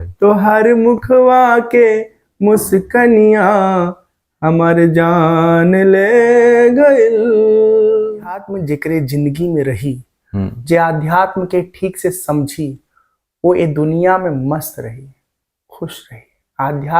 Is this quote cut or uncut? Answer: cut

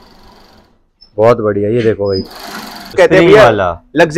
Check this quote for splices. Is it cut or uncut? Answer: cut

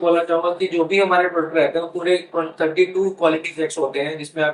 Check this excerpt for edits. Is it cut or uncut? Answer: uncut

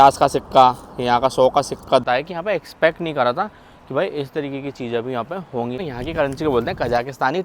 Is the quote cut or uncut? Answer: cut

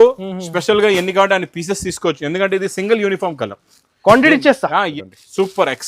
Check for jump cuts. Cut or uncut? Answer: cut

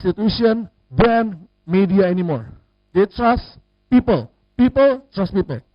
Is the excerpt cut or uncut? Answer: uncut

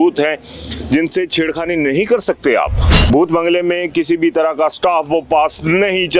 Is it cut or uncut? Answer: cut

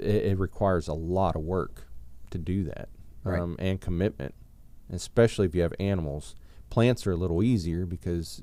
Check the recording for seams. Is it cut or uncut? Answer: uncut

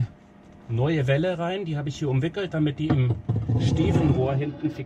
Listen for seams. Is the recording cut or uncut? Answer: uncut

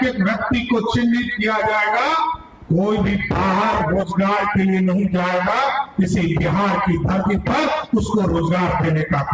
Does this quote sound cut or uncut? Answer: uncut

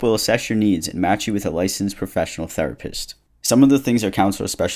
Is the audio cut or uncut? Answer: uncut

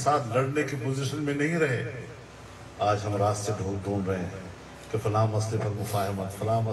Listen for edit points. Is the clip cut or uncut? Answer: uncut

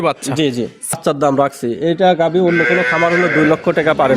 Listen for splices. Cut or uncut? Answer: cut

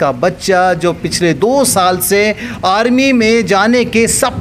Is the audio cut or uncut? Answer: uncut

